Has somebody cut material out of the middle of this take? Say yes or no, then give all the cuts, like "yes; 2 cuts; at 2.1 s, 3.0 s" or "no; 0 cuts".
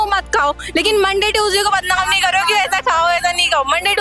no; 0 cuts